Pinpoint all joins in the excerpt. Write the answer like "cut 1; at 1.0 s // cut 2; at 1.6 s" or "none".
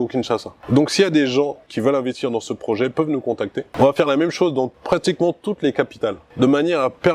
cut 1; at 1.6 s // cut 2; at 3.7 s // cut 3; at 4.8 s // cut 4; at 6.2 s